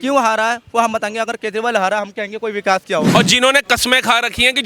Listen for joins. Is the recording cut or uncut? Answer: cut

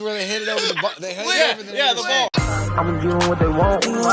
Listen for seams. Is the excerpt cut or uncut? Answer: cut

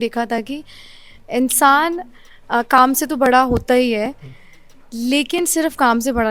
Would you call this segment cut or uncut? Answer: uncut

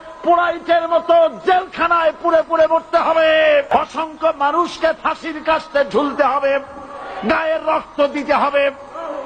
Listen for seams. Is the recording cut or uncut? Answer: cut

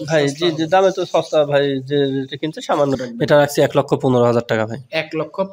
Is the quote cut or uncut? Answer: cut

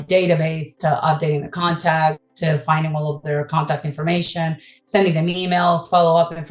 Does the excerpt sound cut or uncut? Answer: uncut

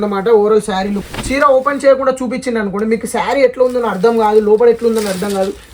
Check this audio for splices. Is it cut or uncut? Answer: cut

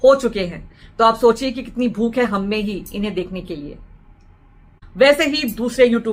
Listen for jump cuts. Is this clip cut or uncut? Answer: uncut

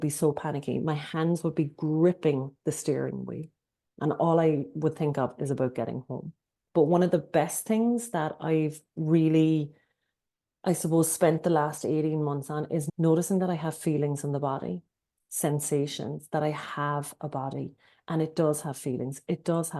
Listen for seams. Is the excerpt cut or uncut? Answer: cut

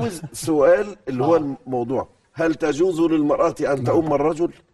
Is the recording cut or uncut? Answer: uncut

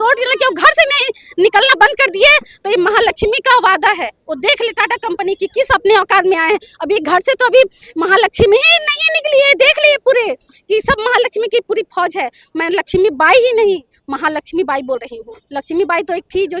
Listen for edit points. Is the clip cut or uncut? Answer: uncut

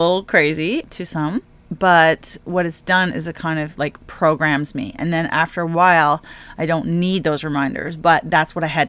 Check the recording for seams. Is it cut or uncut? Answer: cut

